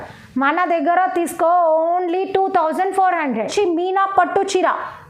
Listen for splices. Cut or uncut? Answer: cut